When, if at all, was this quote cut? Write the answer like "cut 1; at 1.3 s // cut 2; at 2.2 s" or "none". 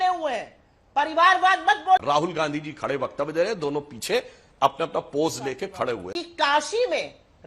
cut 1; at 2.0 s // cut 2; at 6.1 s

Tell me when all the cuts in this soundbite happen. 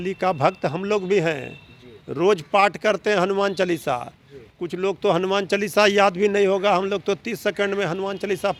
none

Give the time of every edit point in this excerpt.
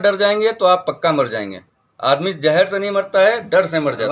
none

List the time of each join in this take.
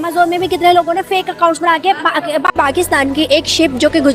cut 1; at 2.5 s

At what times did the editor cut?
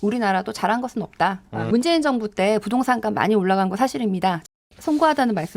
cut 1; at 1.7 s // cut 2; at 4.4 s

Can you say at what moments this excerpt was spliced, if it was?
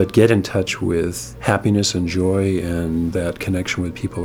cut 1; at 1.3 s // cut 2; at 3.3 s

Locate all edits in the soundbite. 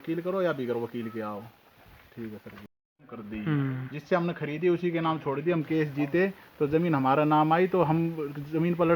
cut 1; at 2.6 s

